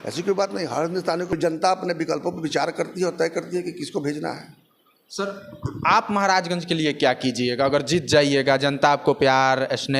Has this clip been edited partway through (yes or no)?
yes